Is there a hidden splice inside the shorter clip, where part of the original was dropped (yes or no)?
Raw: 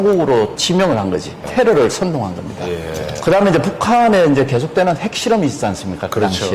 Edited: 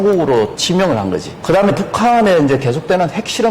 yes